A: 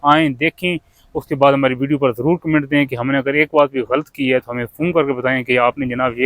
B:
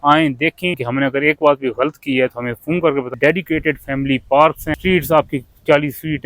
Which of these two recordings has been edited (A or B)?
B